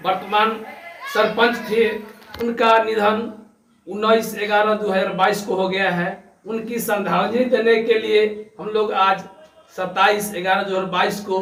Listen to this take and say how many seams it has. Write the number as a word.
zero